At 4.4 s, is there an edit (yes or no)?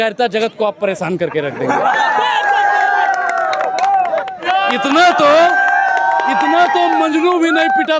yes